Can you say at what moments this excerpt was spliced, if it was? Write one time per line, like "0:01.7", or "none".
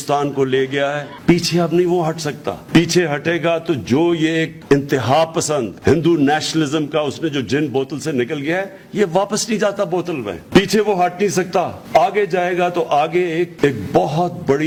none

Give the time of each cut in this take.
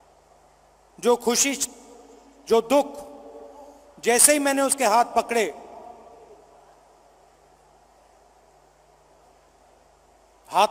none

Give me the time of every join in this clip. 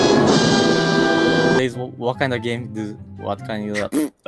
0:01.6

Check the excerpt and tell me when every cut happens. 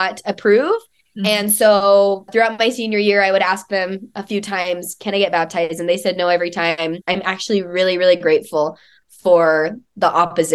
0:07.0

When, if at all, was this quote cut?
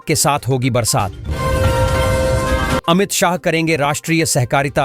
0:01.3
0:02.8

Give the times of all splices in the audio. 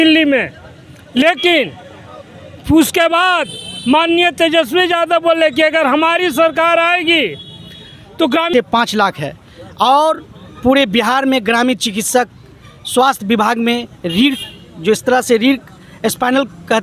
0:08.5

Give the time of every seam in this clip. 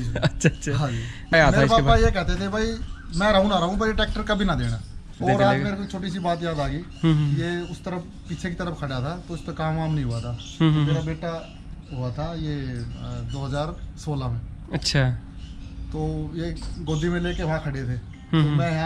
0:01.3
0:05.2

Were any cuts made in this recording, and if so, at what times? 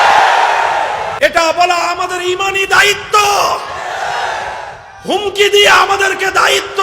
0:01.1

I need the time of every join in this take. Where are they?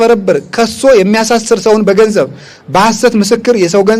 none

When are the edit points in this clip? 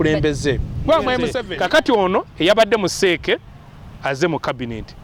0:01.4

